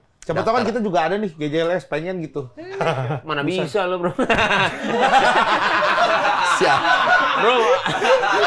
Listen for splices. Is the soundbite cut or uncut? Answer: uncut